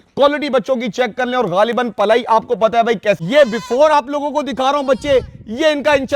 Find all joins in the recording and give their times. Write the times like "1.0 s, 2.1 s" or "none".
3.2 s